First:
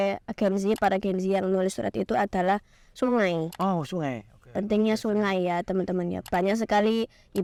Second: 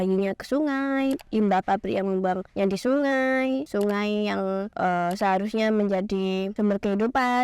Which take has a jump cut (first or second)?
second